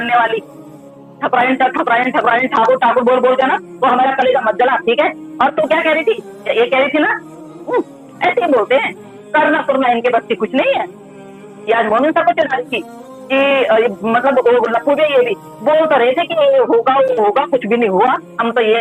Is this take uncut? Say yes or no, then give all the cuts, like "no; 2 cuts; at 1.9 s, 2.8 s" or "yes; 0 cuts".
yes; 0 cuts